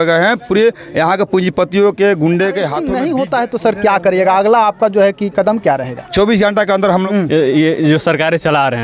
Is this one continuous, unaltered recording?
no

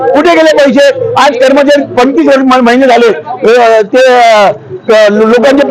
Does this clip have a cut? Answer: no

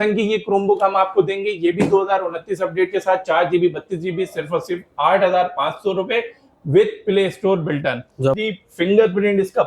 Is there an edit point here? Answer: yes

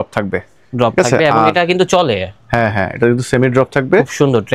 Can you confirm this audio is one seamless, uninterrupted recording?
yes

